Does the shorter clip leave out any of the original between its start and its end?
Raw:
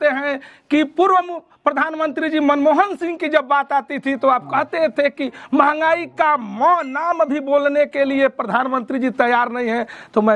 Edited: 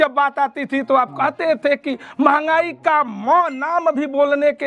no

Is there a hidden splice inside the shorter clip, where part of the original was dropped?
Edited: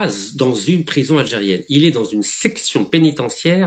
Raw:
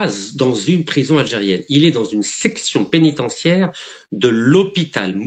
no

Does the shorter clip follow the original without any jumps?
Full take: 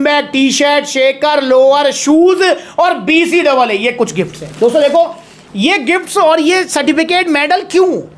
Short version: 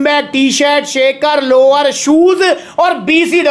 yes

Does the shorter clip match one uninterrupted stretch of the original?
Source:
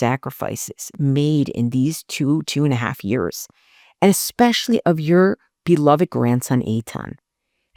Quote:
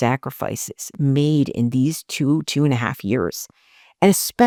yes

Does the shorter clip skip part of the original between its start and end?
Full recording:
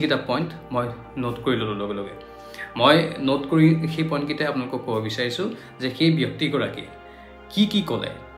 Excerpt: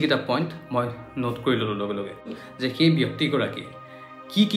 yes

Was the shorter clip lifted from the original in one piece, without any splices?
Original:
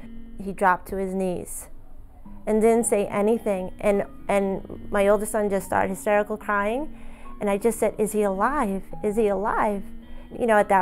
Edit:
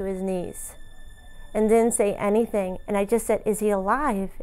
no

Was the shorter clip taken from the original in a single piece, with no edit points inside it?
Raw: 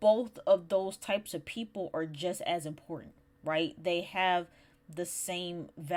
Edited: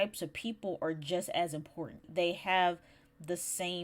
no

